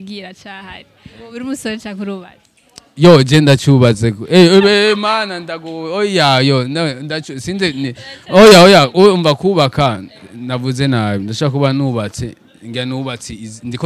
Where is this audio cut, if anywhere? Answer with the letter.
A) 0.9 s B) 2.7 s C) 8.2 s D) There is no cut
A